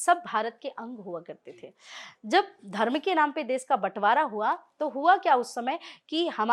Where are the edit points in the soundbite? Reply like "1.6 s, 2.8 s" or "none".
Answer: none

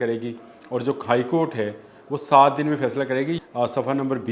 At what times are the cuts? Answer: 3.4 s

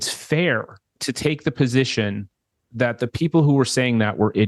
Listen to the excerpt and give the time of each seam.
none

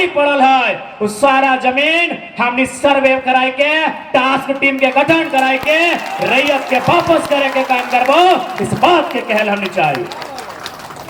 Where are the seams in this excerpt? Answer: none

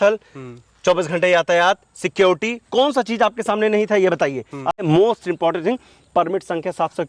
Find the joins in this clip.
4.8 s

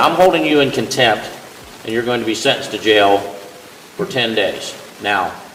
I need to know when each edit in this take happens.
none

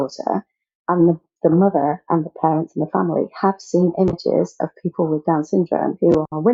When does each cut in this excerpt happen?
none

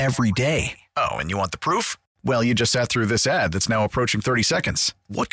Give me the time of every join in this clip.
none

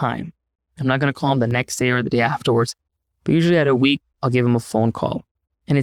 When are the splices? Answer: none

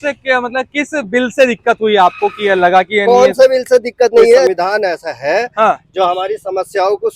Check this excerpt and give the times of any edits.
4.5 s

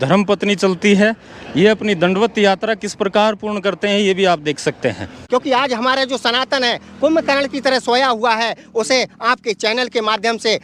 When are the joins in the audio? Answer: 5.1 s

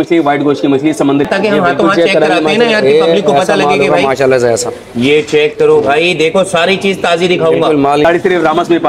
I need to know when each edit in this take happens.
1.3 s, 8.0 s

